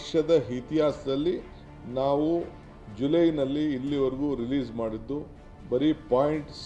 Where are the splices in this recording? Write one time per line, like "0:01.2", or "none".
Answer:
none